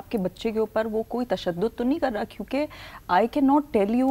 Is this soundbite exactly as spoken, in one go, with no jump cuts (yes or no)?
yes